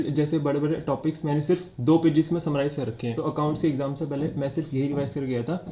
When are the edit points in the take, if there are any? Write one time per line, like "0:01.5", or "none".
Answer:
0:03.1